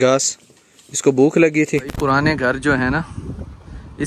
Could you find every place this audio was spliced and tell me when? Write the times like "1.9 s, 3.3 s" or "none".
1.9 s